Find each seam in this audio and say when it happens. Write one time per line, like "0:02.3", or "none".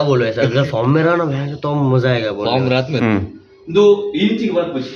0:02.9